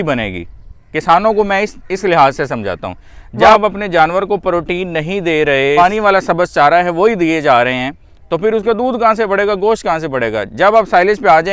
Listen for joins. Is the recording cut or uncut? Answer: cut